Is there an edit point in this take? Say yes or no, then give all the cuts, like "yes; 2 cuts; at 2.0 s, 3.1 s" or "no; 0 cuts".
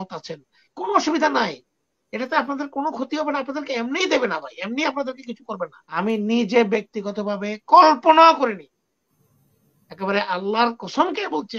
yes; 1 cut; at 6.0 s